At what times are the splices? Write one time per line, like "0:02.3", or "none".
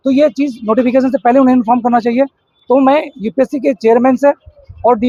none